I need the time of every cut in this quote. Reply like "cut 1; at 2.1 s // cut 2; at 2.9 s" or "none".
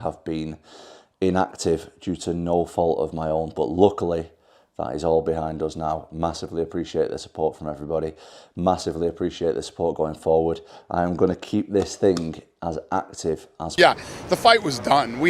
cut 1; at 13.8 s